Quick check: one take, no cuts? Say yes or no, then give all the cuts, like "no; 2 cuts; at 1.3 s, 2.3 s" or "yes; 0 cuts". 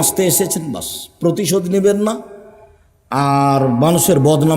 yes; 0 cuts